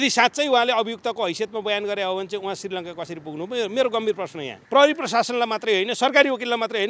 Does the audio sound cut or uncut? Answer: cut